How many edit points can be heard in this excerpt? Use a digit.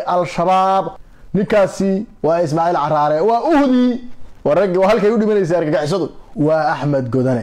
2